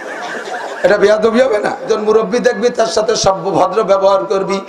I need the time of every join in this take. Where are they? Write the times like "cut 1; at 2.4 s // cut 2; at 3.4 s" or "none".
cut 1; at 1.8 s